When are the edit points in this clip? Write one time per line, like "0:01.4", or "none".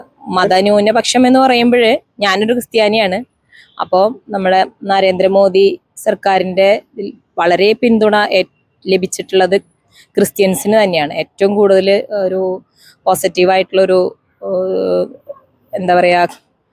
none